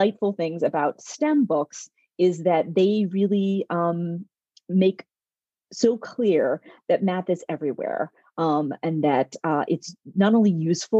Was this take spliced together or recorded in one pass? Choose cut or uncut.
uncut